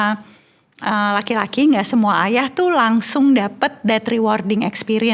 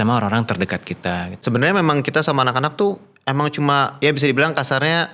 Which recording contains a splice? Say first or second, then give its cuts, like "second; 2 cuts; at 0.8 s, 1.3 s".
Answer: second; 1 cut; at 1.4 s